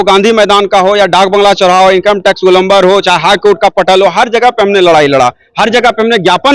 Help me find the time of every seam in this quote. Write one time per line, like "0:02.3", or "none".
none

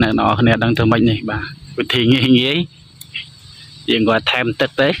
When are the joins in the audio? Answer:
none

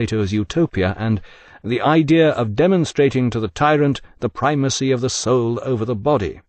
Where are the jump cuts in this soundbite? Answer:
none

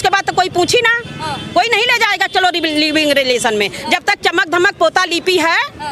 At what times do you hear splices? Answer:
none

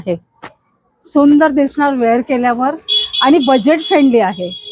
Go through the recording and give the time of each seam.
none

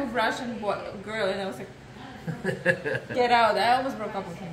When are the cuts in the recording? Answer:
none

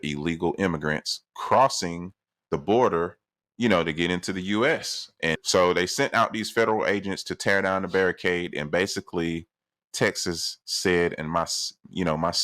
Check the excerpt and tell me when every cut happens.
0:05.4

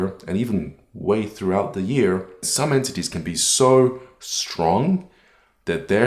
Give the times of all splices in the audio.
0:02.5

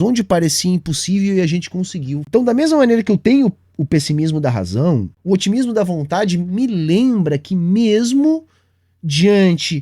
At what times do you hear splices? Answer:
0:02.2
0:05.1

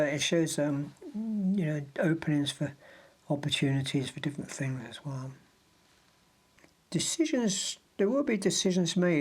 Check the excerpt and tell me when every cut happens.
0:06.6

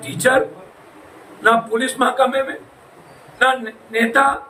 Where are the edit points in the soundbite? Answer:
none

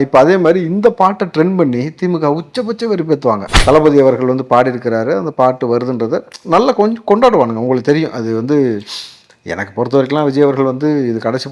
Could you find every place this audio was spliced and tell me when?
0:03.5

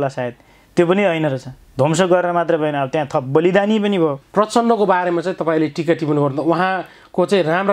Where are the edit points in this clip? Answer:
0:04.2

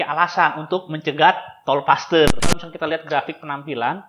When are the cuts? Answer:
0:02.4

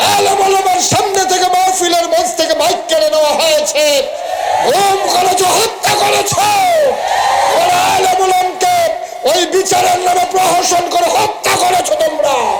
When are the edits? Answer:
none

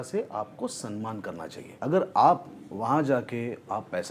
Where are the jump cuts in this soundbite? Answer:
0:01.6

